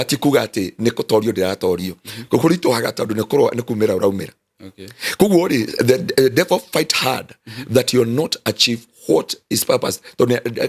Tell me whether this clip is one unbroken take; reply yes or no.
yes